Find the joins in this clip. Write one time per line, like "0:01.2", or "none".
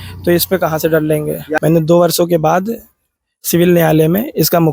0:01.5